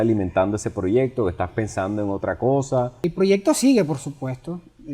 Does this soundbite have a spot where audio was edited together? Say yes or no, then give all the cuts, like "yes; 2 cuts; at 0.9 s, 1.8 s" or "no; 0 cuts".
yes; 1 cut; at 3.0 s